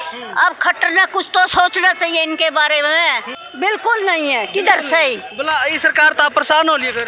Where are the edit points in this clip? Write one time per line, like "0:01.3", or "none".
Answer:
0:03.3